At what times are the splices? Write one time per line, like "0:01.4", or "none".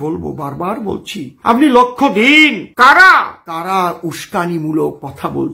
none